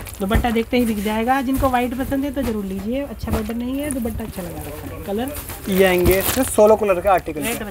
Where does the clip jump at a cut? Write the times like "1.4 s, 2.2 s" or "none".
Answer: none